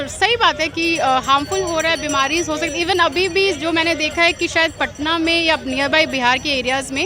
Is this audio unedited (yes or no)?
yes